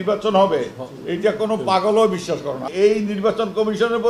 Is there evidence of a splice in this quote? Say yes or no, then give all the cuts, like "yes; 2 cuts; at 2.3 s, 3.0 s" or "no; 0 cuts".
yes; 1 cut; at 2.6 s